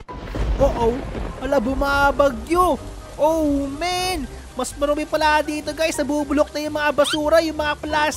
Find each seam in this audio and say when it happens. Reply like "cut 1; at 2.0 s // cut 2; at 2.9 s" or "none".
none

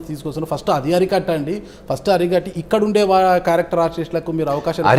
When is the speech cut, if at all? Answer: none

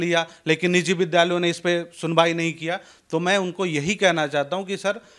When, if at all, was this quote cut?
none

